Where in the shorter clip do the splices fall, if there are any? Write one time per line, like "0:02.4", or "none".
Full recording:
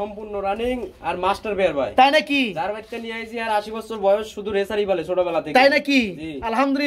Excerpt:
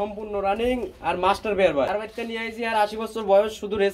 0:01.9